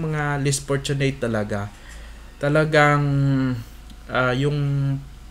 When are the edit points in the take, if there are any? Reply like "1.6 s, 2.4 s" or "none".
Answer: none